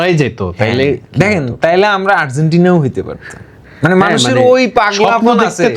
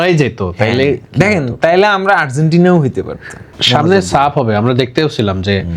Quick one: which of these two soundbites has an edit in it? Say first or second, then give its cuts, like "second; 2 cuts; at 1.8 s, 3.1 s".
second; 1 cut; at 3.5 s